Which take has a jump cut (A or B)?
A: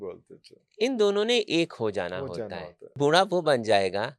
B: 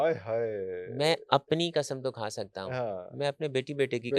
A